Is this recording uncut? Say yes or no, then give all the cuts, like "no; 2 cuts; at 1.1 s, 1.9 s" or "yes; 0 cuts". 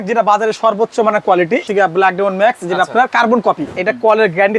no; 2 cuts; at 1.7 s, 3.7 s